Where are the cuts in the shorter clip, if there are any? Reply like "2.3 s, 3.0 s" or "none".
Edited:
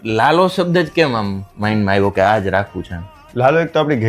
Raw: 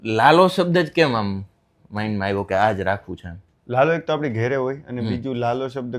1.4 s